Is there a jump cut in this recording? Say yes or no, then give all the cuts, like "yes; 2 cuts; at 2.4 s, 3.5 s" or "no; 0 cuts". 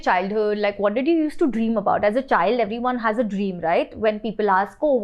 no; 0 cuts